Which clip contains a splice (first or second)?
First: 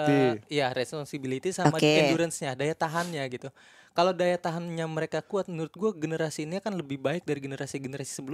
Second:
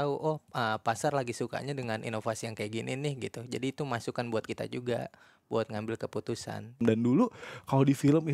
second